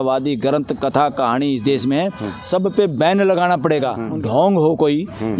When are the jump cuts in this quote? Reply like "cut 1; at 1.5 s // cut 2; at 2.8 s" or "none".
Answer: cut 1; at 4.1 s